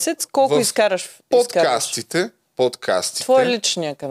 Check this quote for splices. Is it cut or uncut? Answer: uncut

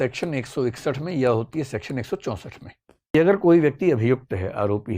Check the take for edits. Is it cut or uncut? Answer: cut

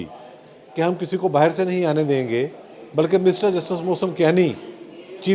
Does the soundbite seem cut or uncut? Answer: uncut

